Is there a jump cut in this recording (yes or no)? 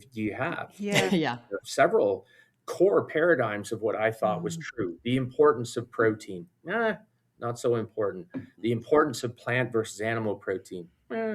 yes